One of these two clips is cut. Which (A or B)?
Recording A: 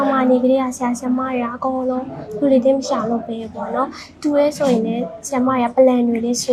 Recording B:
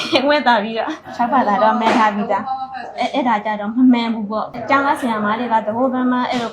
B